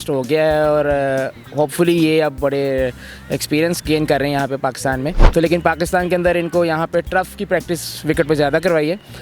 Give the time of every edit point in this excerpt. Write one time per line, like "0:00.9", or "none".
0:05.2